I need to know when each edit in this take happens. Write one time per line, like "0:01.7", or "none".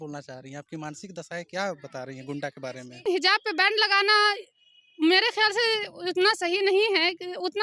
0:03.0